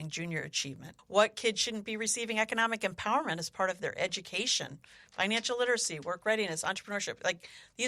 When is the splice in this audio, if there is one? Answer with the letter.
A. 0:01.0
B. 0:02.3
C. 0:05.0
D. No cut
A